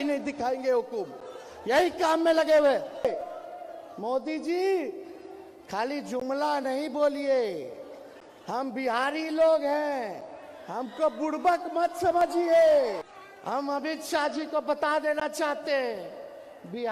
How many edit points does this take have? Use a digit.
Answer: 2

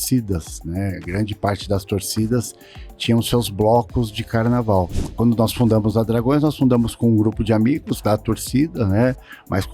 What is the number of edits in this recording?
1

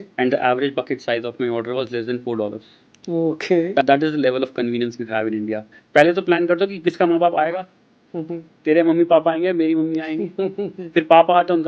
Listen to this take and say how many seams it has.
1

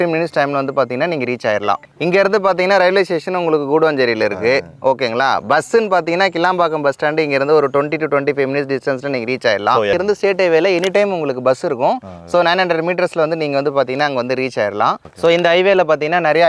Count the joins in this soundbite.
3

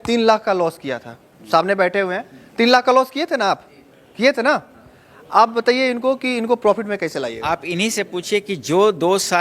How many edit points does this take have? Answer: 1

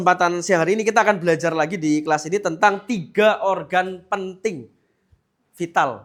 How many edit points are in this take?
0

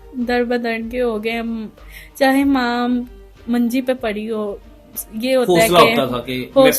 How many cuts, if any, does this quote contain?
0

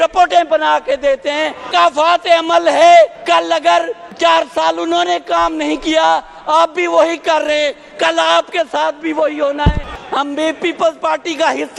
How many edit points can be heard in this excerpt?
3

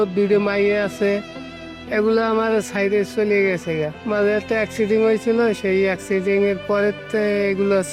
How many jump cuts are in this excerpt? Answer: 0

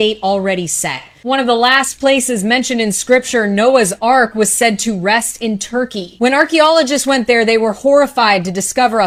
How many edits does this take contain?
0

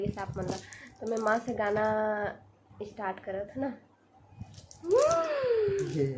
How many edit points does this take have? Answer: 0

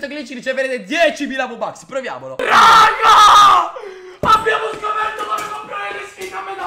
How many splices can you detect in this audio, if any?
1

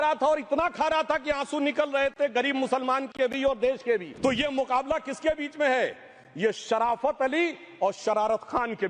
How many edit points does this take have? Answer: 1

